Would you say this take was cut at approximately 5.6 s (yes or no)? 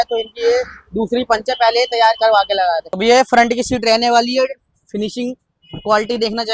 no